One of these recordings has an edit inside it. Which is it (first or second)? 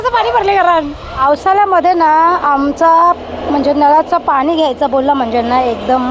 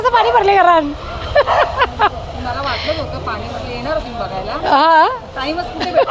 first